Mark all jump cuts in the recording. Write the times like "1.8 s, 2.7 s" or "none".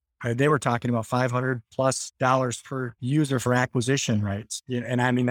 2.1 s, 2.9 s